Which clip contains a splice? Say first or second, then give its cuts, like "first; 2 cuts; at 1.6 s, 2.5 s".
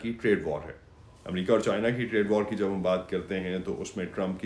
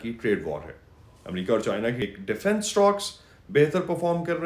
second; 1 cut; at 2.0 s